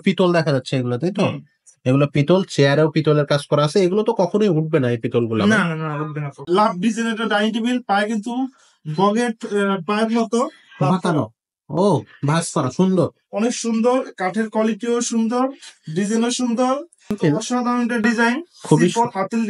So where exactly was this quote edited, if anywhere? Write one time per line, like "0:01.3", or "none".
0:06.4
0:17.1